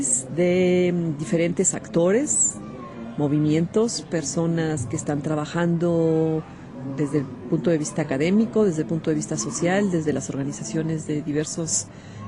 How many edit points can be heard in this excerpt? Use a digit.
0